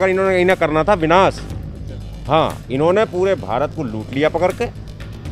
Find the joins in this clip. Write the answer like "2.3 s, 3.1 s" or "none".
none